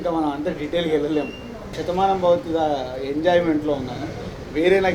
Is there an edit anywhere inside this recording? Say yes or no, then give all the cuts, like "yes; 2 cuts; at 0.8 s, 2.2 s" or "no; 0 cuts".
yes; 1 cut; at 1.7 s